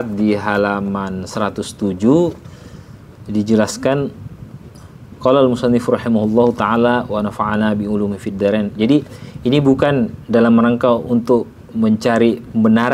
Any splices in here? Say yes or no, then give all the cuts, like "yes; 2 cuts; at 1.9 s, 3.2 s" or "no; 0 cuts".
no; 0 cuts